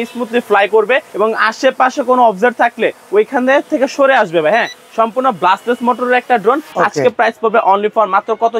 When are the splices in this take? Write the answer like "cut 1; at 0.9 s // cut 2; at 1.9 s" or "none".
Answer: cut 1; at 1.1 s // cut 2; at 6.7 s